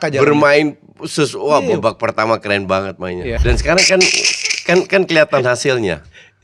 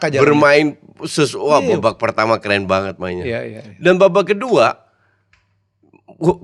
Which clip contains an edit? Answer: first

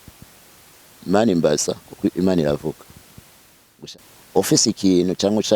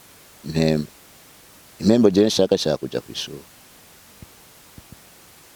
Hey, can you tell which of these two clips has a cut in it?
first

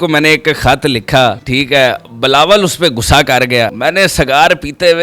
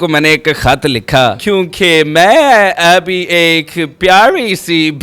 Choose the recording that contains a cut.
second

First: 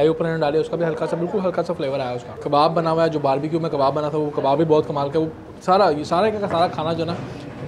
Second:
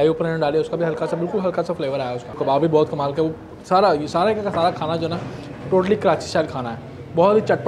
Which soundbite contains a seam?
second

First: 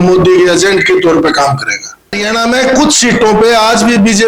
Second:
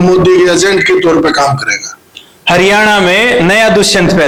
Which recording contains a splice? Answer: first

